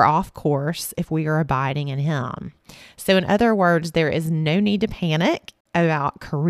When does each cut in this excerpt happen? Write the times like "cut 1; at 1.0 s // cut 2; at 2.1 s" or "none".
cut 1; at 5.5 s